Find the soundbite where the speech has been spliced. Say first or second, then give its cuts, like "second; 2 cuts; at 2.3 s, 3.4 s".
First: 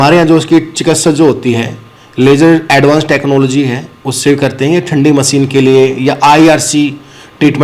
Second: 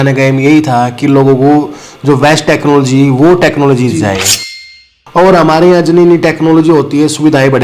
second; 1 cut; at 4.7 s